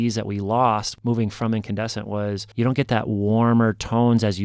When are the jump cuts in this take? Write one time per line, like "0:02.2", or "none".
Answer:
0:00.9
0:02.5